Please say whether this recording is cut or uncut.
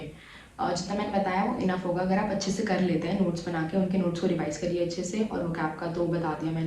uncut